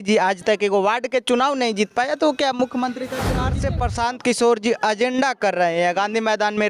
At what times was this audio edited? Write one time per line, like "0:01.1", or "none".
0:03.6

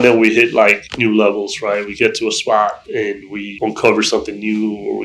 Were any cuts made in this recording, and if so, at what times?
none

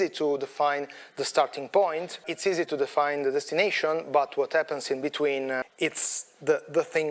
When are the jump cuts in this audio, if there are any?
0:02.3
0:05.7

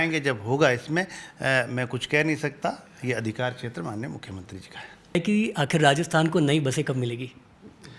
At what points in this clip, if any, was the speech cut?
0:05.2

